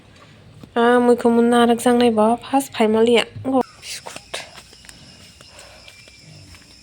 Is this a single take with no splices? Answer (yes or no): no